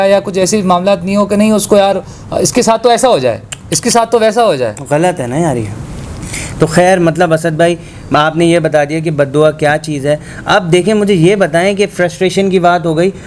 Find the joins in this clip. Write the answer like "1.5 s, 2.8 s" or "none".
none